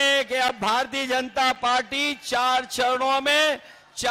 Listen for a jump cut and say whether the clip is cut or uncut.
uncut